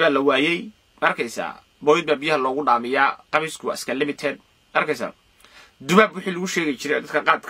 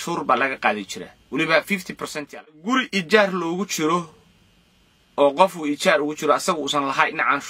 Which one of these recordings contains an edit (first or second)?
second